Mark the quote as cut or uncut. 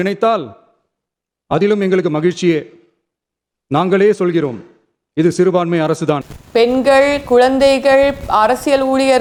uncut